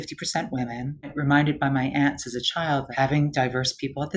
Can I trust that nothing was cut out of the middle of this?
no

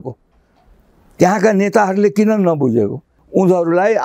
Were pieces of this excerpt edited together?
yes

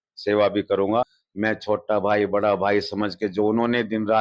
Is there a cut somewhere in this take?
yes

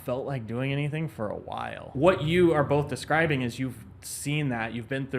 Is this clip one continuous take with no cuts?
no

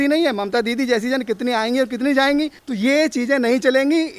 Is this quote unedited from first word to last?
no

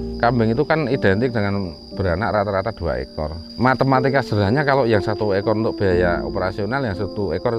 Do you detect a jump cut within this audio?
no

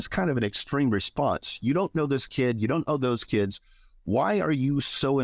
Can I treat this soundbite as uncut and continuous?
yes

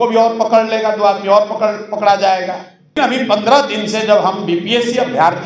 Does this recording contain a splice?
yes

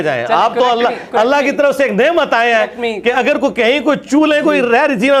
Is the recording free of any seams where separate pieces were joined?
yes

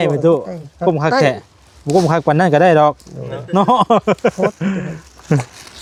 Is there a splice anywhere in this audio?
no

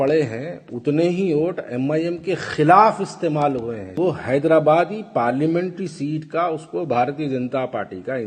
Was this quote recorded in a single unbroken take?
no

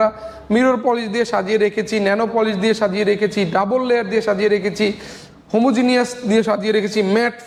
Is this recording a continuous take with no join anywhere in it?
yes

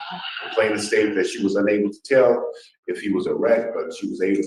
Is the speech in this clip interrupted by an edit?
no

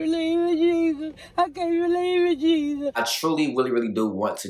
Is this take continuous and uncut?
no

